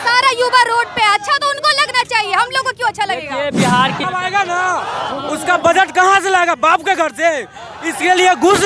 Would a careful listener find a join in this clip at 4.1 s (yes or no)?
yes